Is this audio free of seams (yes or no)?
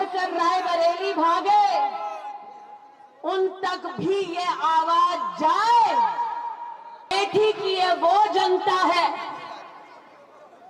no